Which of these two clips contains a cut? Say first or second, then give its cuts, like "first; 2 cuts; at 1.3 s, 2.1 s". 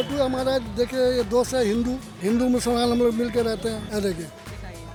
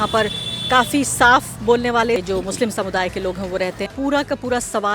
second; 2 cuts; at 2.2 s, 3.9 s